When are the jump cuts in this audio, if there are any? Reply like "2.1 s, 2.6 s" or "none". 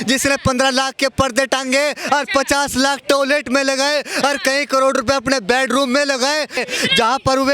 6.6 s